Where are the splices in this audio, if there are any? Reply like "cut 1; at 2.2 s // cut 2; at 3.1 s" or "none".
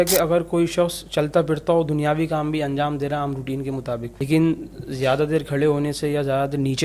cut 1; at 4.1 s